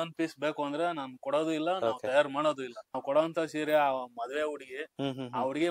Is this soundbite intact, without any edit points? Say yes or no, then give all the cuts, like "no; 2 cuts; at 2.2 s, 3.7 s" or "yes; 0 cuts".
no; 1 cut; at 2.9 s